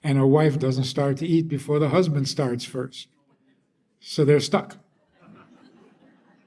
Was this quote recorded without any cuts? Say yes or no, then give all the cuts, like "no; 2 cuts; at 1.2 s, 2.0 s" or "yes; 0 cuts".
yes; 0 cuts